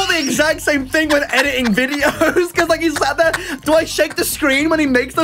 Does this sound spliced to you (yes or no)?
no